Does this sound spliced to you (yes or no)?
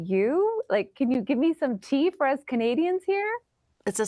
no